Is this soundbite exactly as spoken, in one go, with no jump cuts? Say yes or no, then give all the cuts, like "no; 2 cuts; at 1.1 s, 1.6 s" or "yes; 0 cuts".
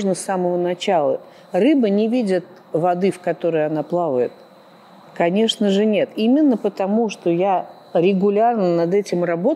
yes; 0 cuts